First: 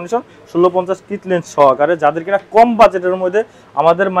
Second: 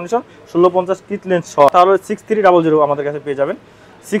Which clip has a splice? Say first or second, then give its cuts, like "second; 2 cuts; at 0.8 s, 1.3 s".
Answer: second; 1 cut; at 1.7 s